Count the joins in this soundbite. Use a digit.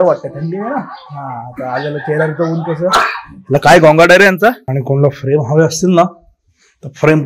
1